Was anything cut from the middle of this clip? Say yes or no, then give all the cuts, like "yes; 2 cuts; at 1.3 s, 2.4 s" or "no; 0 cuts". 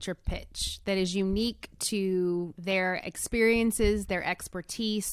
yes; 1 cut; at 2.5 s